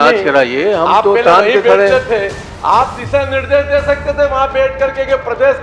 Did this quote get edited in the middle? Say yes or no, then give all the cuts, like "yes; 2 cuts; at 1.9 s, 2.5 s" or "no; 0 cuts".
no; 0 cuts